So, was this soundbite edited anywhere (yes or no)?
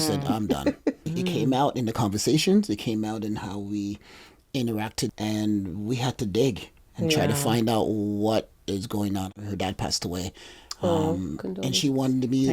yes